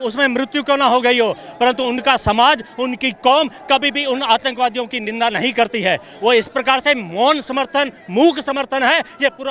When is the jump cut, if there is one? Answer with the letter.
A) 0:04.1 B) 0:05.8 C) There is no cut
C